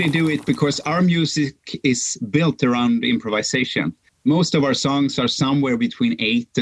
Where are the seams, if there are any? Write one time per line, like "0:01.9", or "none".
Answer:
0:04.1